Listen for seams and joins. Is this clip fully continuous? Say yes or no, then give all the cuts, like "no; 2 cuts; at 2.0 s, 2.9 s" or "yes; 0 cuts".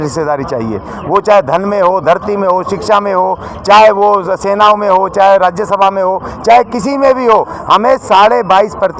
yes; 0 cuts